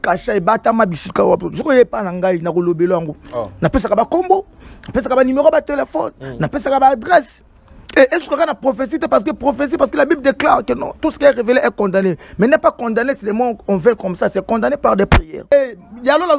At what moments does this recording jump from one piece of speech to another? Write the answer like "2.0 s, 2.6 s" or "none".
15.5 s